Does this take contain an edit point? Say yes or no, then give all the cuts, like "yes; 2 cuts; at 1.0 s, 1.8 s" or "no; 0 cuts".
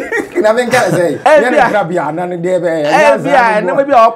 yes; 1 cut; at 1.2 s